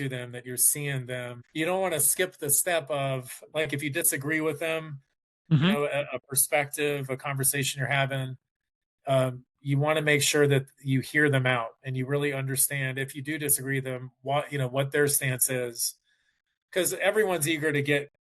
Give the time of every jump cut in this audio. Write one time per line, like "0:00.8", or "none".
0:01.4